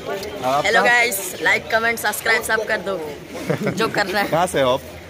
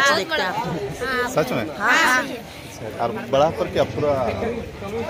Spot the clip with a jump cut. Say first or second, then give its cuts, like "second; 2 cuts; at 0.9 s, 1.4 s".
second; 1 cut; at 2.8 s